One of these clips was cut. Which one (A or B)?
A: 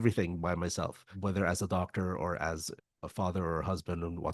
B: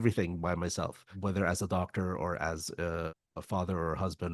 A